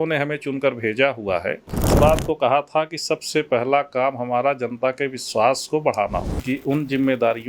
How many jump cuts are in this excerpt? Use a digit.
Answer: 2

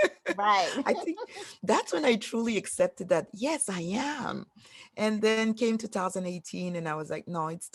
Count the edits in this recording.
0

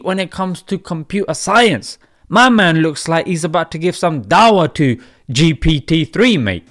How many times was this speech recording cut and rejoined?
0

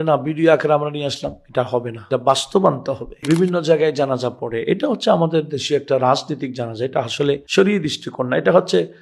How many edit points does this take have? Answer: 2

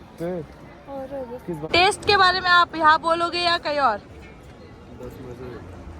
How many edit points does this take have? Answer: 1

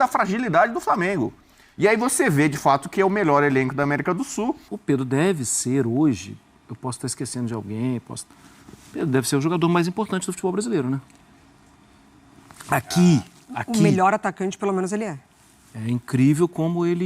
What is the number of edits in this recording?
1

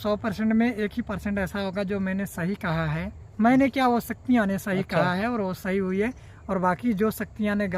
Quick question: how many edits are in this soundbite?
0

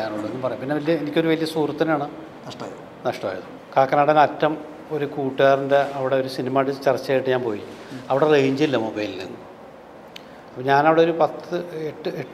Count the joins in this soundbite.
1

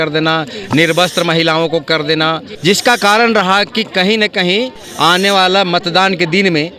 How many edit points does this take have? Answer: 1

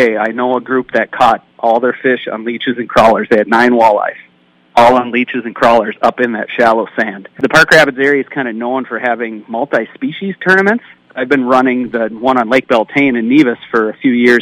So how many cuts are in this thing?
2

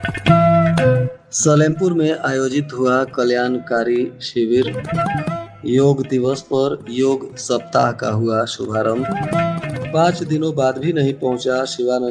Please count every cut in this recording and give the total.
1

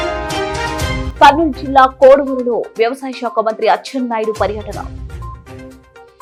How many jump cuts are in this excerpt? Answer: 0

